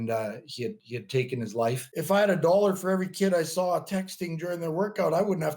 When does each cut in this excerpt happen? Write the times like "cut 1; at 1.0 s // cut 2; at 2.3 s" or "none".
cut 1; at 1.9 s